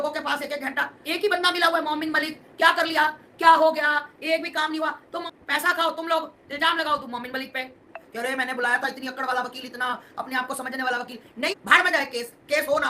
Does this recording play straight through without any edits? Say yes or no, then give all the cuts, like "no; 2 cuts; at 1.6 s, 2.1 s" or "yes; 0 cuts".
no; 4 cuts; at 1.0 s, 5.2 s, 8.0 s, 11.5 s